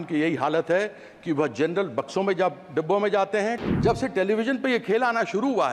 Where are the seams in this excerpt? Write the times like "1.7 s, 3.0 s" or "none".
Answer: 3.6 s